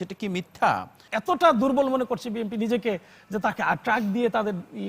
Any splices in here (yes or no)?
yes